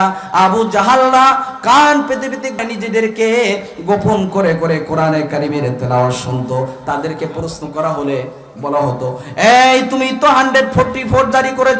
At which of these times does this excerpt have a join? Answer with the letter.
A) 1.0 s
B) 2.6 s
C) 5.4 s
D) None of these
B